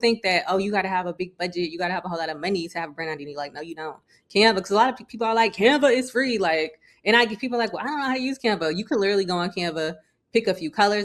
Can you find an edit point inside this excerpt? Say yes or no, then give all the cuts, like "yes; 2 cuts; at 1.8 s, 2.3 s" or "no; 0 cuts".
no; 0 cuts